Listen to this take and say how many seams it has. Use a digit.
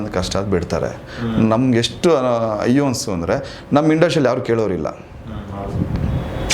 0